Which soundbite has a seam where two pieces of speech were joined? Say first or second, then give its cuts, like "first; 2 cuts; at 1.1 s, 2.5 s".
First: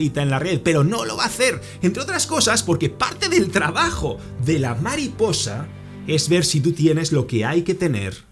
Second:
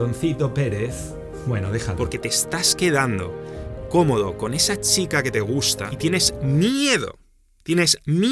second; 2 cuts; at 2.0 s, 6.0 s